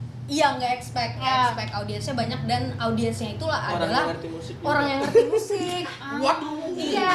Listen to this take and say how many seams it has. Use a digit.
0